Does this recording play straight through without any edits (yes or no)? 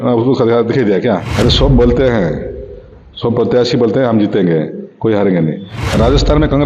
no